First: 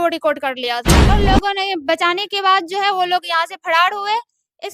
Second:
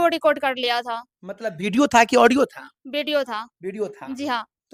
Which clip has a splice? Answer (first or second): first